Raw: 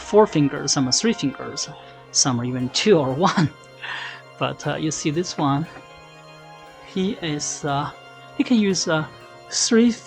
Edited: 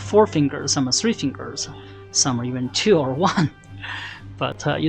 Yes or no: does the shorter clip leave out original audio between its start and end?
no